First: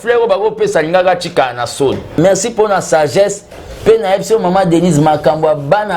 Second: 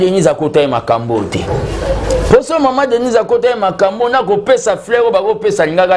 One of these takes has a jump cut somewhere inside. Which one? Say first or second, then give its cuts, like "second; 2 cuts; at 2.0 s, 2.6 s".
first; 1 cut; at 2.1 s